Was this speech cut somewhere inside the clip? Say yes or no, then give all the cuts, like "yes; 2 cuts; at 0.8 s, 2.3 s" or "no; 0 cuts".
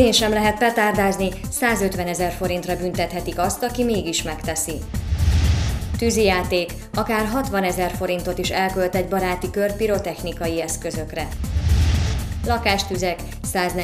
no; 0 cuts